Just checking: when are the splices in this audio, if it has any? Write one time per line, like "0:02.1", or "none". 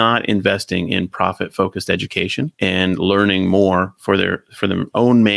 0:02.5